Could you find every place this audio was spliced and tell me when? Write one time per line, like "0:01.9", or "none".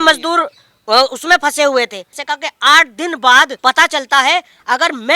0:02.1
0:03.5